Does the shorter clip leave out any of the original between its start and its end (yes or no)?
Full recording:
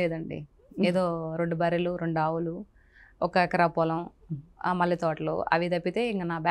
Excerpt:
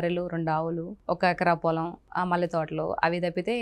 yes